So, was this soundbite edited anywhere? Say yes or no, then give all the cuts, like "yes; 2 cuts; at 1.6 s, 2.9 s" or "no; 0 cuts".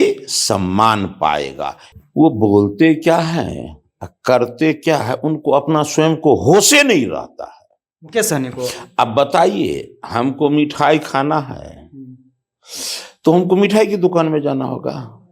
yes; 1 cut; at 1.8 s